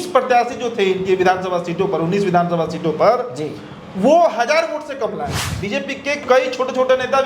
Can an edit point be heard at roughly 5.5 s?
yes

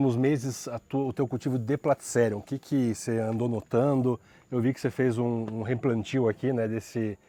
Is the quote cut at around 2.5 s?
no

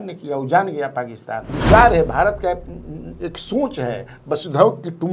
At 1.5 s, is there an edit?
yes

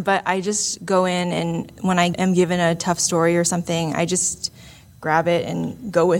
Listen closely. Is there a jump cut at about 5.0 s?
no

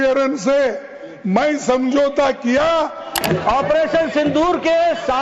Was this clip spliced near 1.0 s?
no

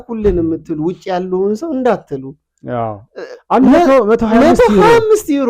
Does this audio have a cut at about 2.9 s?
no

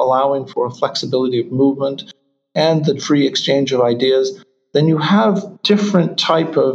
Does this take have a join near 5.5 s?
yes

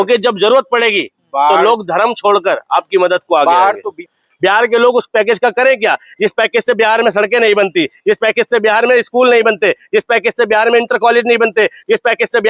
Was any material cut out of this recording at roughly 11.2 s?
no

